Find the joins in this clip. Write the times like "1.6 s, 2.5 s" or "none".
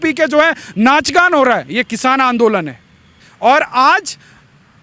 none

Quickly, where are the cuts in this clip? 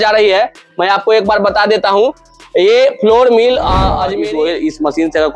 4.1 s

